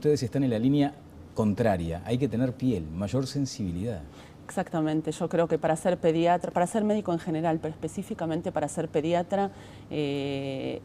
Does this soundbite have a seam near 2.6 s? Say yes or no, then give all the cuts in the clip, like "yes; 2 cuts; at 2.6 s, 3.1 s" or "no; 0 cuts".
yes; 1 cut; at 2.6 s